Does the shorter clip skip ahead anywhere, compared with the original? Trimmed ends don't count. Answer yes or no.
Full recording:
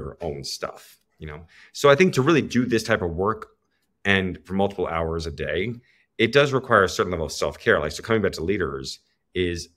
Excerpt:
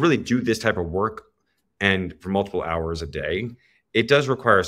no